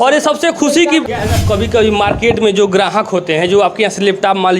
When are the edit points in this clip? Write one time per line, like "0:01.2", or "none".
0:01.1